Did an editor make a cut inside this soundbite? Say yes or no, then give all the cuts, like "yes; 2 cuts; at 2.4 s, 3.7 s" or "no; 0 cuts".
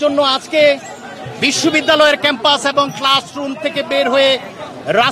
no; 0 cuts